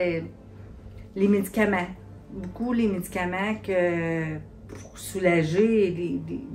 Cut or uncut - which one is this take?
uncut